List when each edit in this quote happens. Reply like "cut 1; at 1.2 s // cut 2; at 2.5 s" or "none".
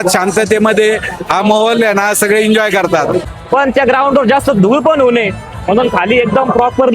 cut 1; at 3.3 s